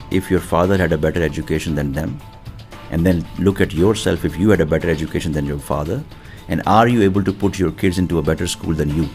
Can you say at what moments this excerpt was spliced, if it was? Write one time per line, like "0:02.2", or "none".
none